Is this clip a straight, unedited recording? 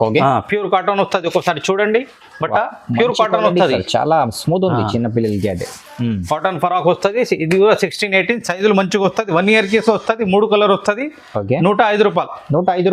yes; 0 cuts

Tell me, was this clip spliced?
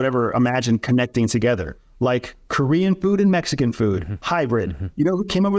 no; 0 cuts

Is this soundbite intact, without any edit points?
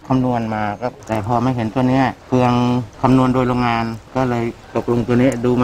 no; 1 cut; at 1.0 s

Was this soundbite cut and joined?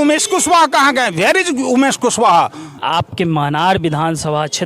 yes; 1 cut; at 2.7 s

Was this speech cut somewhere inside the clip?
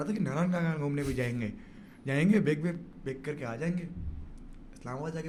no; 0 cuts

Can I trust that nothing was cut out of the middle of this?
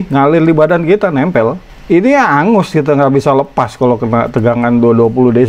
yes; 0 cuts

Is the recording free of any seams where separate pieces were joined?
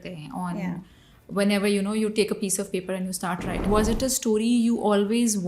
no; 1 cut; at 3.7 s

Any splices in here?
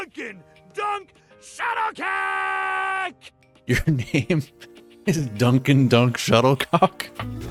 no; 0 cuts

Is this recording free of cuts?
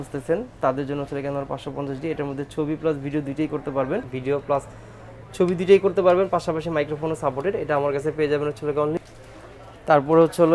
no; 2 cuts; at 4.1 s, 9.0 s

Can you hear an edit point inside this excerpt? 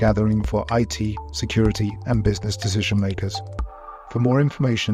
no; 0 cuts

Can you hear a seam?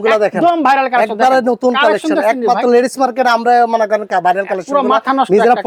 no; 0 cuts

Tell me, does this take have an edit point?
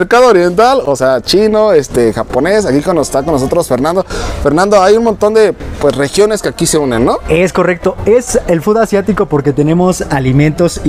no; 0 cuts

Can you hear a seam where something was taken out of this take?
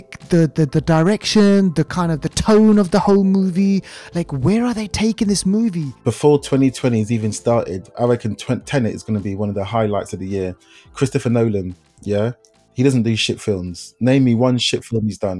yes; 1 cut; at 5.9 s

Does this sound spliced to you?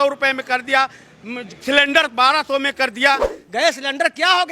yes; 1 cut; at 3.3 s

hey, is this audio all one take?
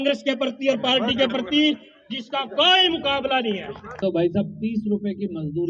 no; 1 cut; at 4.0 s

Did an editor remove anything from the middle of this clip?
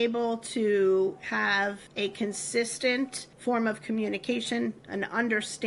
yes; 2 cuts; at 1.8 s, 3.2 s

